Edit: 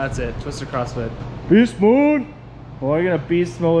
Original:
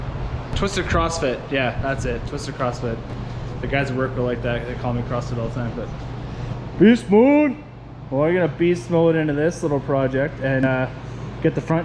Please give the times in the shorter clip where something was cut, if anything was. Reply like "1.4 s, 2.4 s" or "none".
1.2 s